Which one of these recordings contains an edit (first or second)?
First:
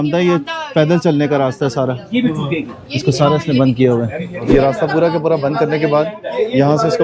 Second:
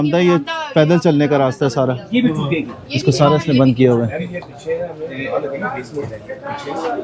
first